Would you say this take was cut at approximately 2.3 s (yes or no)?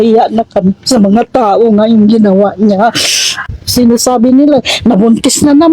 no